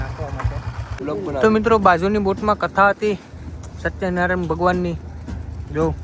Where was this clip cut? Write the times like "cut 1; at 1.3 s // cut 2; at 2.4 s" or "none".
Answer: cut 1; at 0.9 s